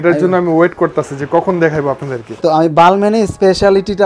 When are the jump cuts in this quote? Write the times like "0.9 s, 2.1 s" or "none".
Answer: 2.2 s